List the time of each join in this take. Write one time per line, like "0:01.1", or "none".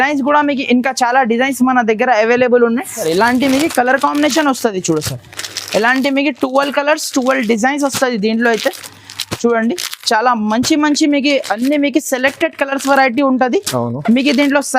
0:03.0

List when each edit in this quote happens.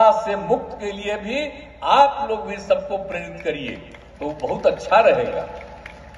none

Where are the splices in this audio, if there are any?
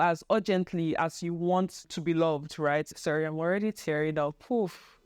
0:01.9
0:02.9

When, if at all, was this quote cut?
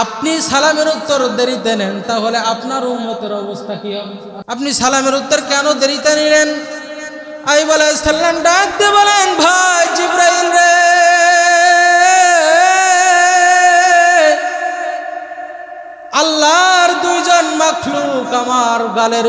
0:04.3

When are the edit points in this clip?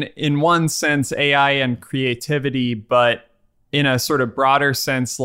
none

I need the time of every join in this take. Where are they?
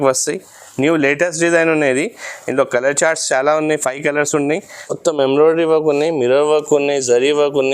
0:04.7

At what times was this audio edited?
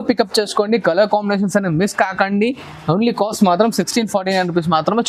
none

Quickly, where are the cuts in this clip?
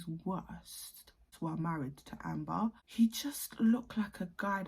0:01.3
0:02.6

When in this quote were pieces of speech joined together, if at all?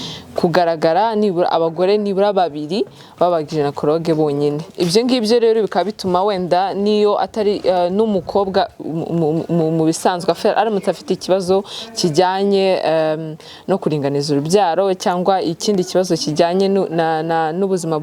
0:04.7

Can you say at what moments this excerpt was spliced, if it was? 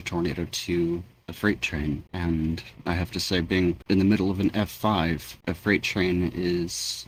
none

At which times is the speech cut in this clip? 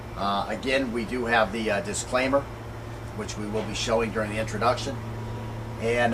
none

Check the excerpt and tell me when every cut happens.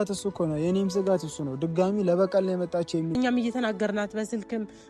0:03.2

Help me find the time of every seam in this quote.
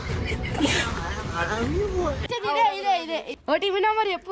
0:02.3

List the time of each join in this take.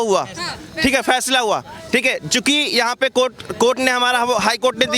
none

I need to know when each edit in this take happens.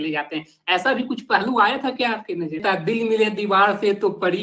0:02.6

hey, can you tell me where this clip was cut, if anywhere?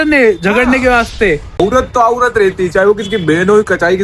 0:01.6

